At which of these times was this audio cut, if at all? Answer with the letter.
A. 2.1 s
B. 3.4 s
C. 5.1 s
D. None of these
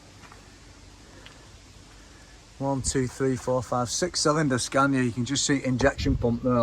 D